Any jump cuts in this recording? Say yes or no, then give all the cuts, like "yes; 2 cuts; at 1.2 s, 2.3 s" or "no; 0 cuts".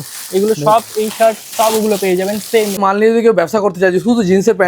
yes; 1 cut; at 2.7 s